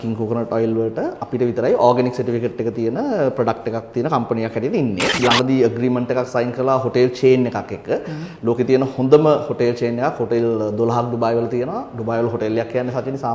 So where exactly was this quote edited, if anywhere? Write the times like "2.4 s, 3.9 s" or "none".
5.2 s